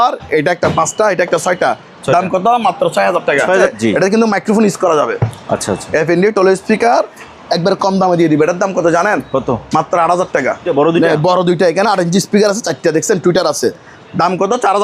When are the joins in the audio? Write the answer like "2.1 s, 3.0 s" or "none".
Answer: 3.7 s, 10.7 s